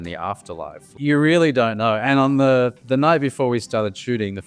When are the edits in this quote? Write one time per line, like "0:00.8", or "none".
0:00.9
0:02.0